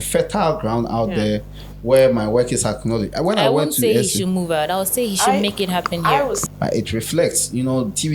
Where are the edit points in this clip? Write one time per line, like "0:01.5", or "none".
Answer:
0:06.4